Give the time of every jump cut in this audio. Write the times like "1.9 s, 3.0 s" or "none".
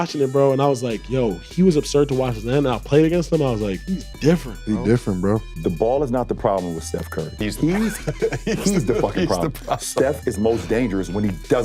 3.9 s, 5.5 s, 7.3 s